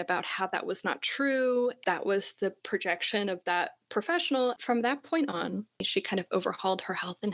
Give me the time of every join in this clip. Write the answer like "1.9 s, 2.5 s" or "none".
1.8 s, 4.6 s, 5.9 s